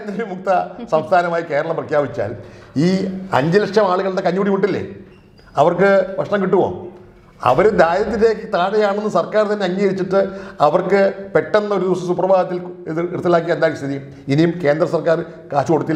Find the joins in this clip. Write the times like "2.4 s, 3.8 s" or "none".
none